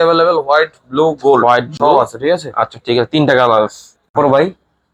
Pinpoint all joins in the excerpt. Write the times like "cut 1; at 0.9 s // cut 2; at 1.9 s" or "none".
none